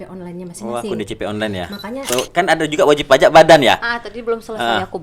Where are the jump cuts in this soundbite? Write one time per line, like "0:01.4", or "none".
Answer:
0:02.0